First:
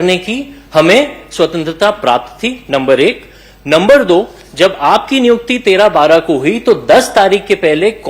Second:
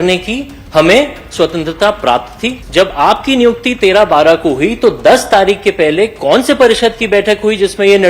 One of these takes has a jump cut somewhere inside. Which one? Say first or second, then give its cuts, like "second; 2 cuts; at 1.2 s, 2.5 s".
second; 1 cut; at 2.6 s